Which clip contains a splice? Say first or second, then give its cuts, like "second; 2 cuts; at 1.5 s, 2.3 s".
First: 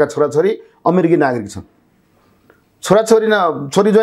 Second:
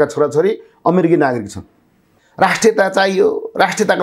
second; 1 cut; at 2.2 s